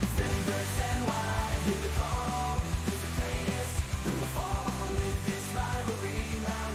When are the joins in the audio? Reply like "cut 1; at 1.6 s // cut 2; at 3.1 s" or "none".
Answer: none